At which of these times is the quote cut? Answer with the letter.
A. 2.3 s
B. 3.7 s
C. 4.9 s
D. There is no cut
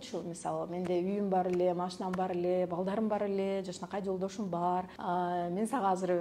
C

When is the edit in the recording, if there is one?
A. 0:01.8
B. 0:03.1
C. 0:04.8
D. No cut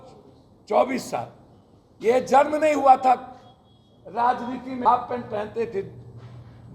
C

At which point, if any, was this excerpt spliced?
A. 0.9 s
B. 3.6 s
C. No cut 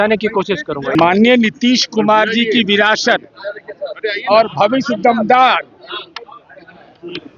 A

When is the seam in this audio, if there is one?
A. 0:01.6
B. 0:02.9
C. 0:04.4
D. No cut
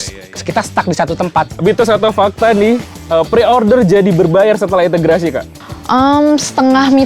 A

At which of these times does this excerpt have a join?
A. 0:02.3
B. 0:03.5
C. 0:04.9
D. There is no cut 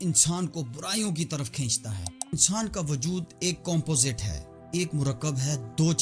A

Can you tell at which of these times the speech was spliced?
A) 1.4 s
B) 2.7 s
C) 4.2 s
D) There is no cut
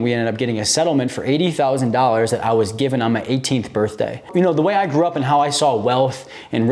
C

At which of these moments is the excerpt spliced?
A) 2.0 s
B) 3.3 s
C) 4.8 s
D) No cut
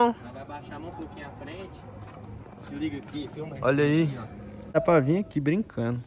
C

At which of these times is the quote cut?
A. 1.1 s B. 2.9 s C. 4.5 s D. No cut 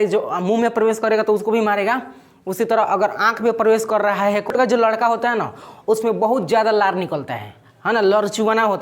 C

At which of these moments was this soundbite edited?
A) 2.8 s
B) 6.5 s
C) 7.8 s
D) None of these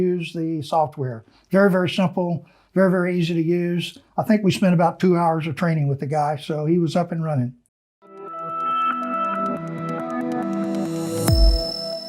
C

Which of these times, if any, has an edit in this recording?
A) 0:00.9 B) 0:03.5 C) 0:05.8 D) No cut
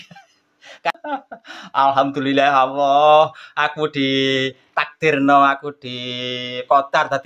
A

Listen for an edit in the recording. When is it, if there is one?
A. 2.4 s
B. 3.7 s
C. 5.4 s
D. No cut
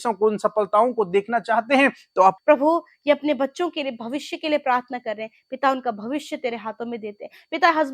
A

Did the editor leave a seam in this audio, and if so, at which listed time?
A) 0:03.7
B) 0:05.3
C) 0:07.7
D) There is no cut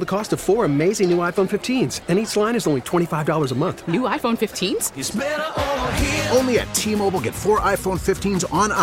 D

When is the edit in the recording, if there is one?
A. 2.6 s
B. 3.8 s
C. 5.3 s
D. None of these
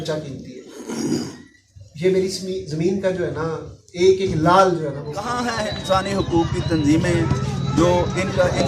C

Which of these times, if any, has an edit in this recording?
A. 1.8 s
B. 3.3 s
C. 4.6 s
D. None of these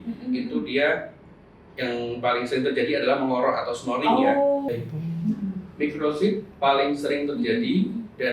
C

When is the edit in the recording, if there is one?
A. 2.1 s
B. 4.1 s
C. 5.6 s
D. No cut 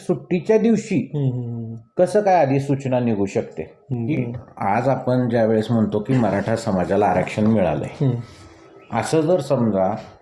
B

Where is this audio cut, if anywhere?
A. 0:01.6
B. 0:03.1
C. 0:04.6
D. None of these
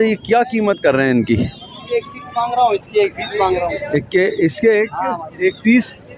D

